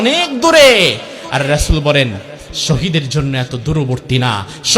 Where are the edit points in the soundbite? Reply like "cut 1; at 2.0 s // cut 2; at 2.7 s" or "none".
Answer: none